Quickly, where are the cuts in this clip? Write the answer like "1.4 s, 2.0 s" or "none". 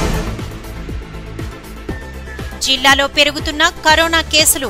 none